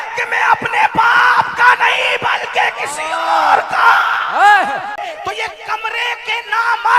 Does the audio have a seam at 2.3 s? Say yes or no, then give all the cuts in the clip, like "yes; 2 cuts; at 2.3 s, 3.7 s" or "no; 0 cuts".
no; 1 cut; at 5.0 s